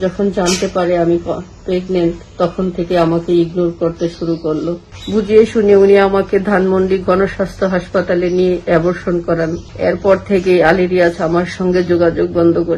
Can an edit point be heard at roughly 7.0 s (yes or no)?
no